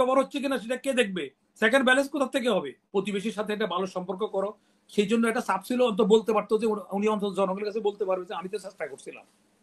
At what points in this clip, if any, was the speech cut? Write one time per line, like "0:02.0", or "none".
0:02.8